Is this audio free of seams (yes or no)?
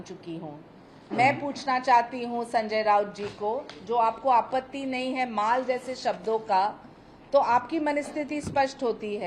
yes